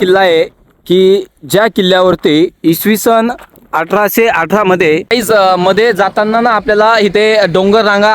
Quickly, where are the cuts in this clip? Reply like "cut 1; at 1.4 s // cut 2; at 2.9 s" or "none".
cut 1; at 5.1 s